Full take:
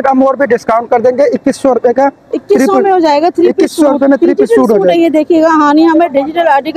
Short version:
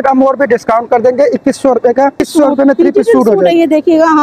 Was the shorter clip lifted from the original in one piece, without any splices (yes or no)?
no